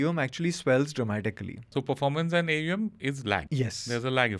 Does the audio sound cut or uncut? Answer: cut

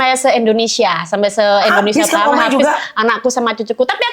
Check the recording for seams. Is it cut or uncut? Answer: uncut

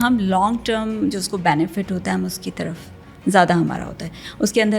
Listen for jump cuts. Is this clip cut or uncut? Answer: uncut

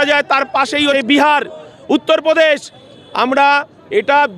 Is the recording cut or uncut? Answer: cut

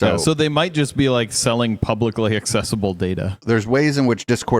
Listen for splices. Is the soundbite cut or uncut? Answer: cut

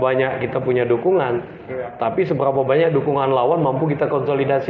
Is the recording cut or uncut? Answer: uncut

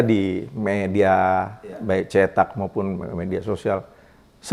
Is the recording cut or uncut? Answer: uncut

